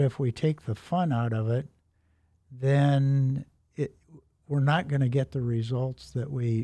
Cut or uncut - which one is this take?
uncut